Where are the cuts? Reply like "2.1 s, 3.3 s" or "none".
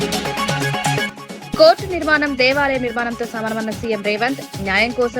1.0 s

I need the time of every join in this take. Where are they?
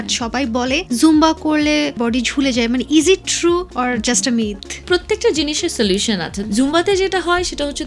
0.8 s, 2.0 s, 3.7 s, 4.8 s, 6.4 s

